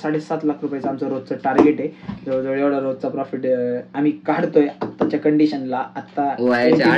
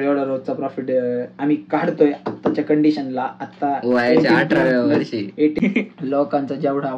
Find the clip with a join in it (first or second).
second